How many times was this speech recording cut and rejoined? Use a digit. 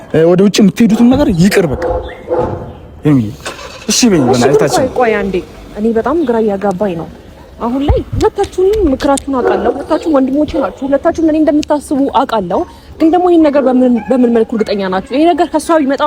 0